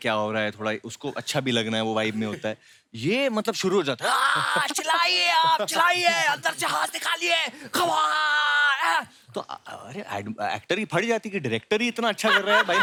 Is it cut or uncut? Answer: uncut